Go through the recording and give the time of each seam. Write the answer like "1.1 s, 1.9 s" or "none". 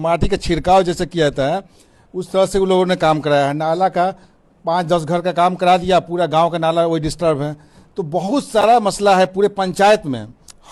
none